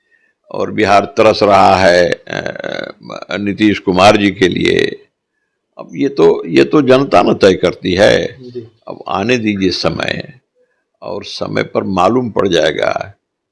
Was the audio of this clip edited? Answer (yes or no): no